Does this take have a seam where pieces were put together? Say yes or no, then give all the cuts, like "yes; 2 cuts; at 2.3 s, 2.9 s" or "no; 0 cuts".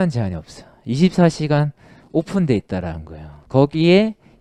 no; 0 cuts